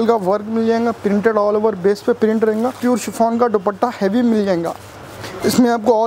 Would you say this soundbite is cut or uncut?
cut